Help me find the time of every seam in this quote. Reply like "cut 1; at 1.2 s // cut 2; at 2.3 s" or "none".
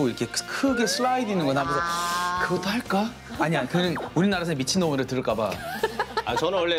none